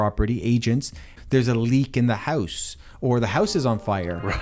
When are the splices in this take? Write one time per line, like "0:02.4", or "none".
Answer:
0:01.2